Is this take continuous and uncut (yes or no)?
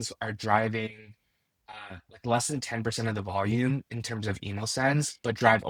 yes